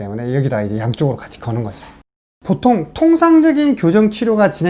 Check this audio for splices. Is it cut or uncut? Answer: cut